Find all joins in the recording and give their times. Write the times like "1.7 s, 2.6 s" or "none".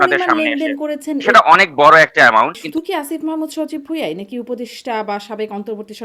1.3 s, 2.6 s

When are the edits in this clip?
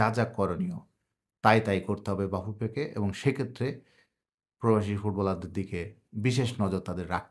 none

